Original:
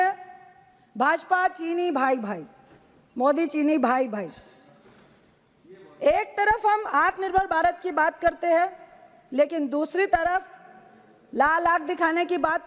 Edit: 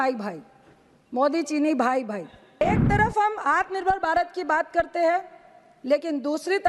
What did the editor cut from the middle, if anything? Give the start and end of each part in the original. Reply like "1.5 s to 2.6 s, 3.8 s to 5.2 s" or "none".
4.6 s to 6.1 s